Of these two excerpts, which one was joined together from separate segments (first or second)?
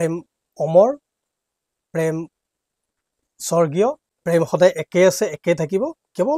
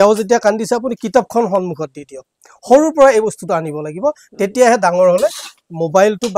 first